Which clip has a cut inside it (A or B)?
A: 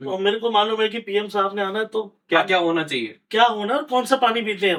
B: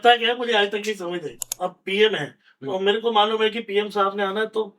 B